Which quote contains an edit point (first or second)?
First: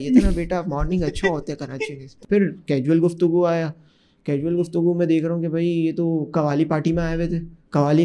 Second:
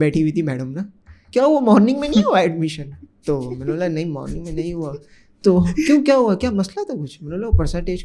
first